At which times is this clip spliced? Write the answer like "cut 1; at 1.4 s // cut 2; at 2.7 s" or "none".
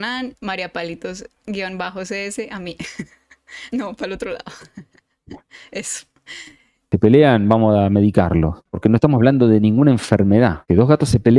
cut 1; at 6.8 s // cut 2; at 8.6 s // cut 3; at 10.6 s